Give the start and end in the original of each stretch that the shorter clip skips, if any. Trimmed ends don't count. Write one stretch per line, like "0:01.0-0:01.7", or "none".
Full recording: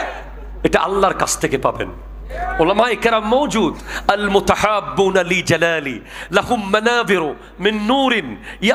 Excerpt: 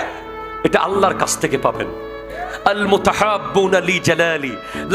0:02.4-0:03.8